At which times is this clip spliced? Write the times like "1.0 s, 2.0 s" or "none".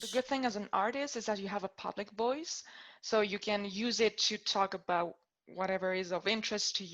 none